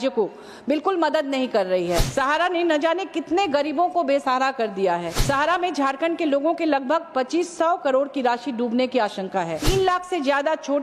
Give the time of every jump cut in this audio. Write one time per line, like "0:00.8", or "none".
0:02.1
0:05.1
0:09.6